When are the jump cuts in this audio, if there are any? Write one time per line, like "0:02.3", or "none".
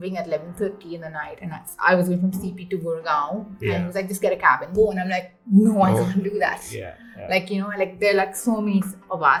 none